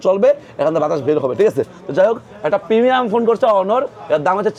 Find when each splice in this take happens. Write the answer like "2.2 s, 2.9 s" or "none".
none